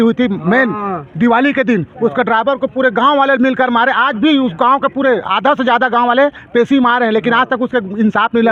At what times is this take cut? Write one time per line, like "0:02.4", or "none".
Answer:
none